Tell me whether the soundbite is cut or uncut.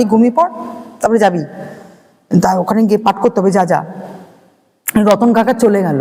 uncut